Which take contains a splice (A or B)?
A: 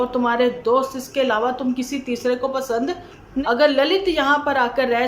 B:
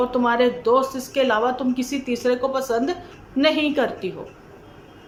A